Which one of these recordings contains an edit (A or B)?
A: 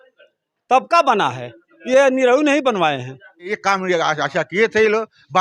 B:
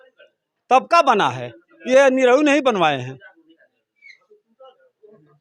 A